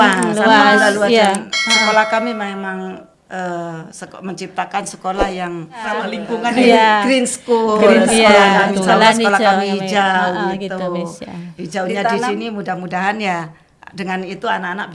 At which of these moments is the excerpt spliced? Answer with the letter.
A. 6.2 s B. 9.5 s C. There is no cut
A